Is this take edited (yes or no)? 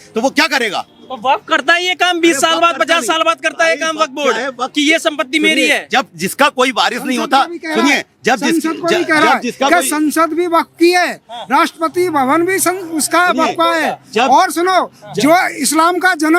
no